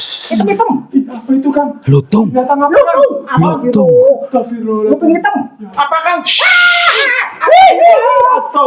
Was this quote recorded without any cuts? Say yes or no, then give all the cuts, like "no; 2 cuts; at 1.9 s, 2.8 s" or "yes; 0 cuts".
no; 1 cut; at 5.7 s